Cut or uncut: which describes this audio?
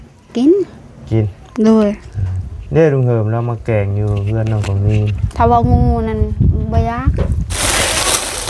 cut